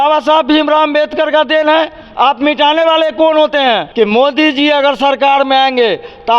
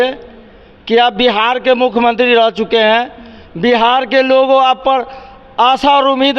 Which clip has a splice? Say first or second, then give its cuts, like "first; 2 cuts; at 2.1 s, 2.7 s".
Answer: first; 1 cut; at 3.9 s